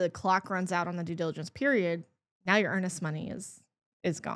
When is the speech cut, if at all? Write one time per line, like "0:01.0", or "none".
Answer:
none